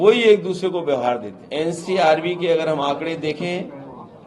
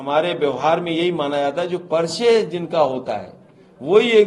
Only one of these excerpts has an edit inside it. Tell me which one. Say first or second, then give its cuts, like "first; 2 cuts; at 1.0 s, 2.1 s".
first; 1 cut; at 1.4 s